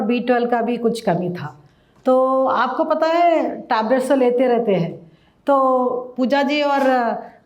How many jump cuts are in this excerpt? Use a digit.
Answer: 0